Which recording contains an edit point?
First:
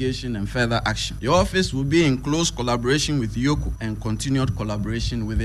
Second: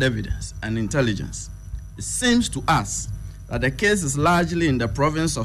first; 2 cuts; at 1.1 s, 3.7 s

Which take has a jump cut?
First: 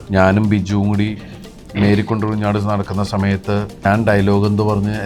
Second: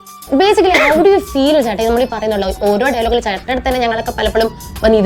first; 1 cut; at 3.8 s

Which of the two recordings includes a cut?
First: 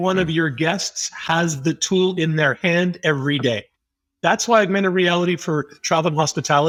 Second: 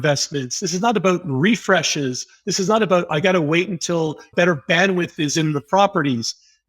second; 1 cut; at 4.3 s

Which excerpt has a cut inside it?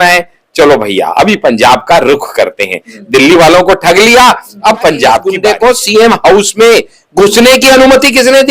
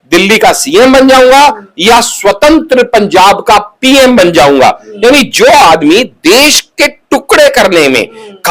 first; 1 cut; at 5.3 s

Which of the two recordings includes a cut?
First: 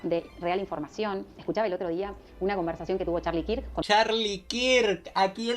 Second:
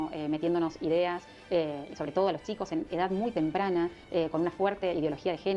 first; 2 cuts; at 1.4 s, 3.8 s

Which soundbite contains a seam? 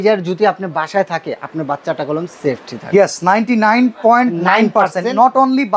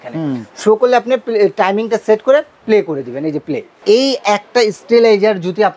second; 1 cut; at 3.8 s

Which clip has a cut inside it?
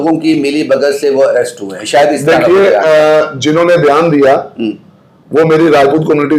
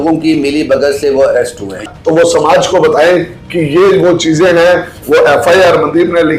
second; 1 cut; at 1.8 s

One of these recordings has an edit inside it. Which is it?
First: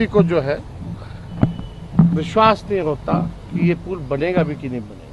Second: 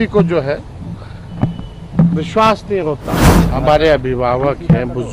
second; 1 cut; at 3.2 s

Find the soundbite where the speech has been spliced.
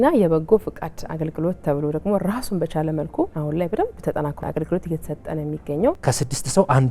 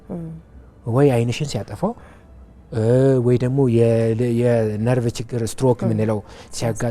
first; 3 cuts; at 3.3 s, 4.4 s, 6.0 s

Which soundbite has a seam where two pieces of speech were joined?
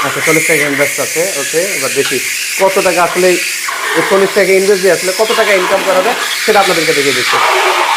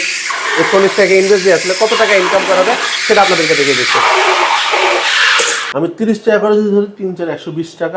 second; 1 cut; at 5.6 s

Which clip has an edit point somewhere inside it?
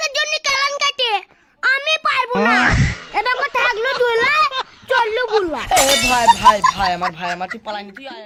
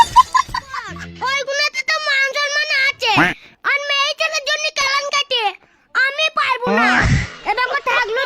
second; 1 cut; at 1.0 s

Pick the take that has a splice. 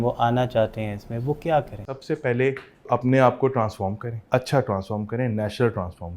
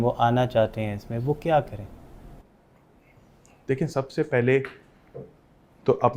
first; 3 cuts; at 1.9 s, 2.9 s, 4.1 s

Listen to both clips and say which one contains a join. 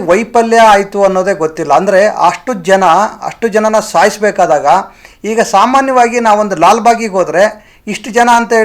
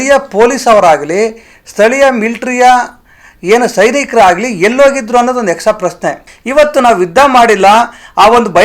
second; 1 cut; at 6.3 s

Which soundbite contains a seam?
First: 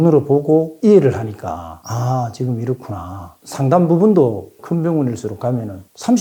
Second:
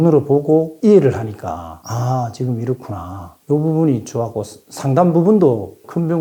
first; 1 cut; at 3.3 s

